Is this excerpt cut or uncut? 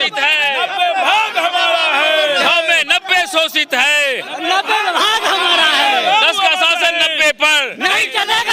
uncut